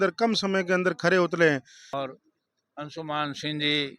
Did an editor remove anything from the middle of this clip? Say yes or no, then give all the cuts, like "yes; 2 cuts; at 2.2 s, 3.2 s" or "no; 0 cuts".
yes; 1 cut; at 2.1 s